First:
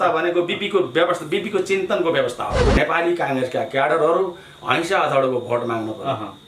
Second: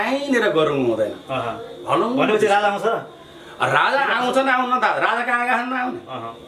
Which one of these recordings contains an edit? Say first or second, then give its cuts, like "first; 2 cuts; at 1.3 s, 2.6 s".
first; 1 cut; at 2.6 s